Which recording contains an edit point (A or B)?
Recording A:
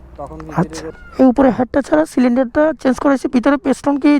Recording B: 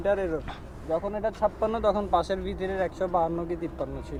A